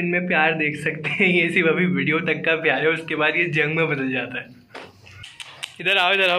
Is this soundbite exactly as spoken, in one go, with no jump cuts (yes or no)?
no